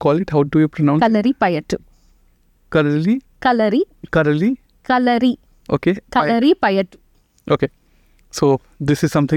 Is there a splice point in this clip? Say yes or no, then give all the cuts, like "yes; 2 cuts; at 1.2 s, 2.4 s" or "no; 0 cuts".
no; 0 cuts